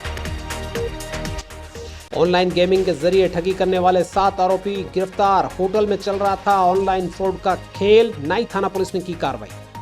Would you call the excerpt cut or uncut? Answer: cut